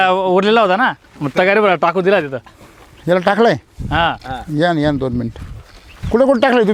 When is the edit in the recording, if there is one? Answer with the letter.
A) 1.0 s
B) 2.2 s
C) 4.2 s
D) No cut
D